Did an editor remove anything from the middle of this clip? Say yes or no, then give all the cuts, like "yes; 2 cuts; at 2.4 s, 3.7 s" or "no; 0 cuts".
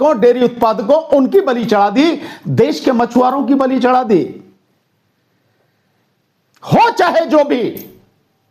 no; 0 cuts